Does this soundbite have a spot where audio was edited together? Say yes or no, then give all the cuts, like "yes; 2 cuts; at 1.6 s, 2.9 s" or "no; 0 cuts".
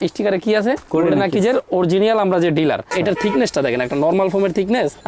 yes; 1 cut; at 2.9 s